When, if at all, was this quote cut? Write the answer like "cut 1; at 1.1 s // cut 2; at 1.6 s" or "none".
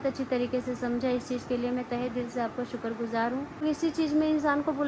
cut 1; at 3.6 s

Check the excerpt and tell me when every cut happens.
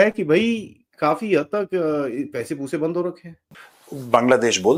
none

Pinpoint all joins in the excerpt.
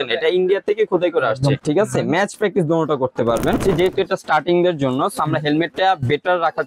cut 1; at 1.6 s // cut 2; at 3.6 s

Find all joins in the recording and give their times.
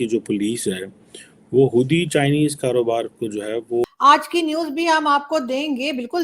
cut 1; at 3.8 s

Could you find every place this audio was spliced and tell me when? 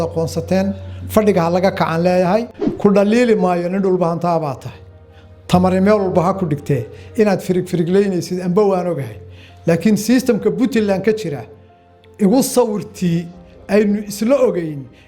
cut 1; at 2.6 s

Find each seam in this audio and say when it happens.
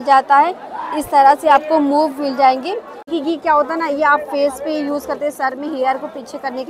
cut 1; at 3.1 s

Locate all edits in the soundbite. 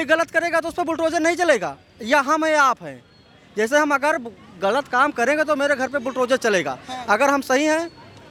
none

